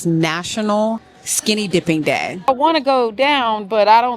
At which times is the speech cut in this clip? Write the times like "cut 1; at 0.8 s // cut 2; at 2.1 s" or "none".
cut 1; at 2.5 s